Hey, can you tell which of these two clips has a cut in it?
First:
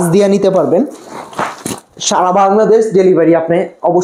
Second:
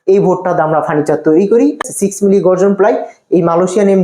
second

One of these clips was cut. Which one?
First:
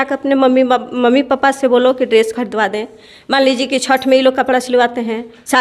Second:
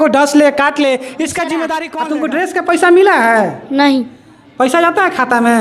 second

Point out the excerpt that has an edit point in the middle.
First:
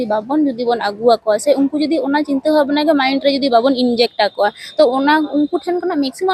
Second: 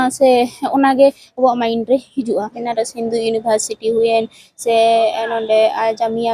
second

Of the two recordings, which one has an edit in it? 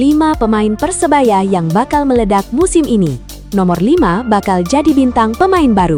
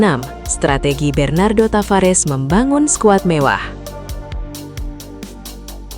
second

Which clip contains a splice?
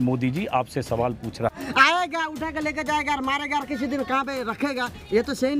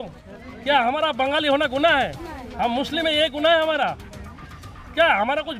first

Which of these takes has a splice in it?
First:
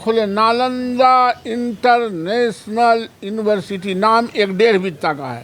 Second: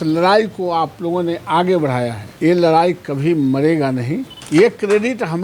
second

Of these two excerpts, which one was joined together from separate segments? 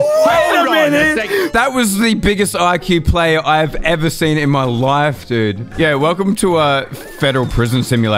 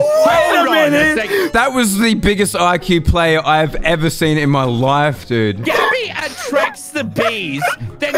first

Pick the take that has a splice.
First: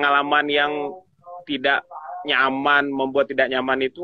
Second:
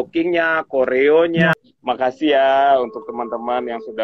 second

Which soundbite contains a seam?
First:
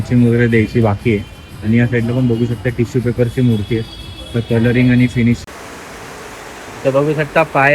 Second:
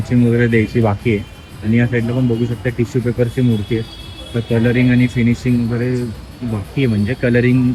first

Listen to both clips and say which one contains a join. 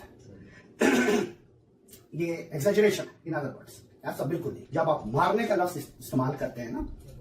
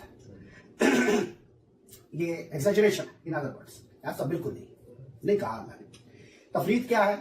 first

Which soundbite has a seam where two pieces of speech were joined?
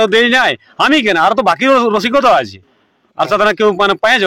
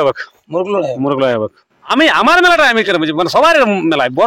second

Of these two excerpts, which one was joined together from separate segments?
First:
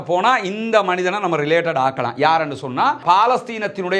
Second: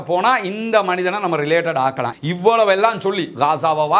second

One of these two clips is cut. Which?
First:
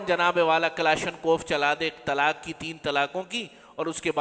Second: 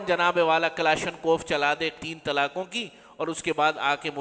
second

